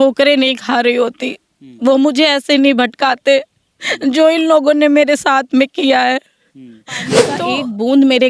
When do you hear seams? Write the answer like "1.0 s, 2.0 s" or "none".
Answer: 7.4 s